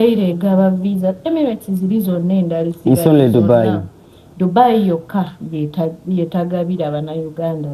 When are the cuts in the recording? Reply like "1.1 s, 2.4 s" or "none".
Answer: none